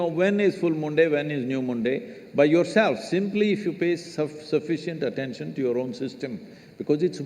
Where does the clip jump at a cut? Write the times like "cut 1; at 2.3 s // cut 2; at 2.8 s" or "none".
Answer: cut 1; at 6.3 s